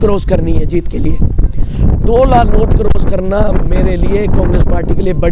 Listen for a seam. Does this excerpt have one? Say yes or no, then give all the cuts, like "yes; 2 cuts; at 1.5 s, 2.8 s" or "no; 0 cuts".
no; 0 cuts